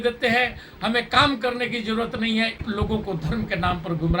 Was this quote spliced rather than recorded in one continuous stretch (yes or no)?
yes